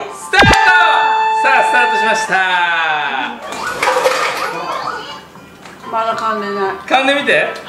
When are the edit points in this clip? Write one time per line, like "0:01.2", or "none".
0:05.7

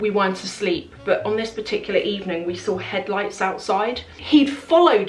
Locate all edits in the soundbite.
0:04.2

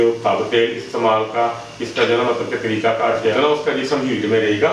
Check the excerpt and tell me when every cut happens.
0:03.3

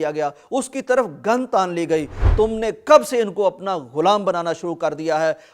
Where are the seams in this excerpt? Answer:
0:02.2

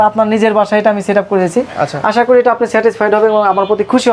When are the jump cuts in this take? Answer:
none

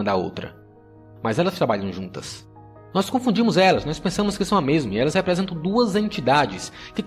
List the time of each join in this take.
none

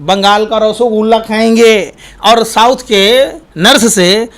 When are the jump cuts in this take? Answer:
0:03.4

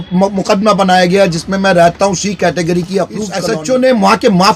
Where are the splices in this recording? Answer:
0:03.4

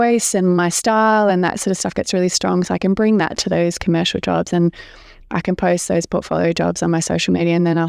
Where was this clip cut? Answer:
none

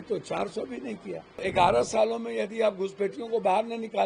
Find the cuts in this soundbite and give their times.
0:01.4

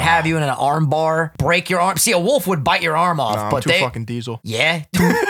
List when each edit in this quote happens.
0:01.3
0:04.4

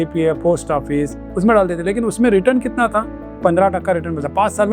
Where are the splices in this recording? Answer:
none

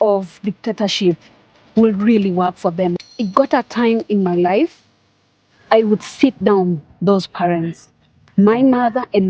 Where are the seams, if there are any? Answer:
0:03.0

